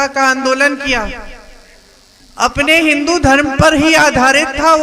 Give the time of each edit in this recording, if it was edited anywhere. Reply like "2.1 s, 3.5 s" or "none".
none